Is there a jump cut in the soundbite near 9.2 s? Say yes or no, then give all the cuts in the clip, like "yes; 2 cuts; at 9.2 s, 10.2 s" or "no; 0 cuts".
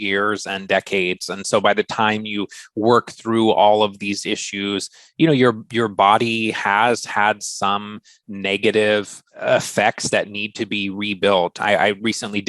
yes; 1 cut; at 9.2 s